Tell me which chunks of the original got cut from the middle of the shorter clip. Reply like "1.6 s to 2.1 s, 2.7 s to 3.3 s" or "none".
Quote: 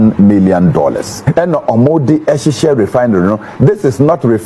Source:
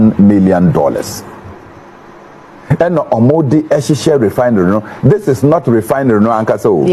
1.1 s to 2.6 s